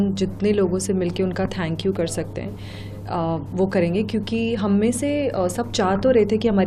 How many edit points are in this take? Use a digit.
0